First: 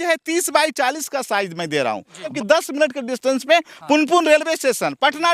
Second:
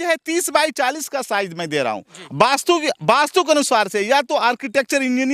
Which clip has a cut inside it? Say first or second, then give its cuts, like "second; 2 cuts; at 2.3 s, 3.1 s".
first; 1 cut; at 2.3 s